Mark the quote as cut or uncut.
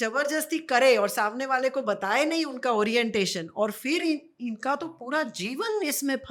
uncut